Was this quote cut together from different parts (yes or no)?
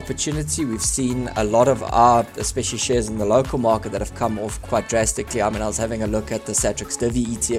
yes